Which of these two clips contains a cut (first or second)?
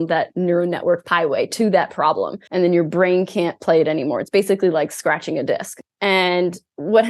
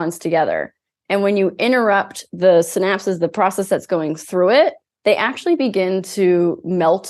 first